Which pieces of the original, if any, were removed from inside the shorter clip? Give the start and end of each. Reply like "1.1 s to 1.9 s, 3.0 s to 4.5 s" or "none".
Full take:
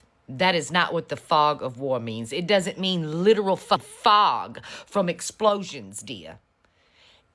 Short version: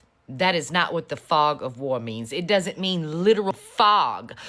3.5 s to 3.8 s